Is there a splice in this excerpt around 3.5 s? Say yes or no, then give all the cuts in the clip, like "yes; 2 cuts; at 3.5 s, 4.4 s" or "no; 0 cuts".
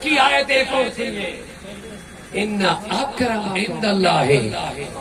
yes; 1 cut; at 3.5 s